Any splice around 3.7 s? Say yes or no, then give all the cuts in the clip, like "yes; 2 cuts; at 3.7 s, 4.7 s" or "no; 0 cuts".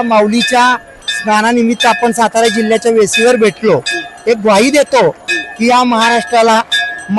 no; 0 cuts